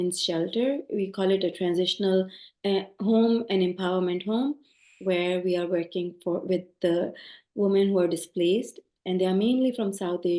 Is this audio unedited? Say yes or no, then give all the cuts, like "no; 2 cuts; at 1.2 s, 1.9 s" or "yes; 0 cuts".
yes; 0 cuts